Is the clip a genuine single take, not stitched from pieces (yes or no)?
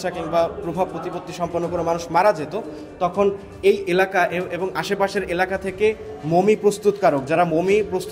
yes